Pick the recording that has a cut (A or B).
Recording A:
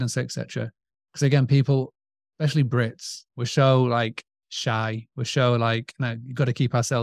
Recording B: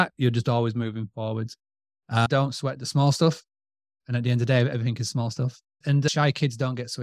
B